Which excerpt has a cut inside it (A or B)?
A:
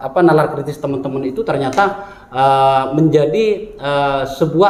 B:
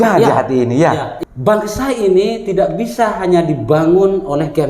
B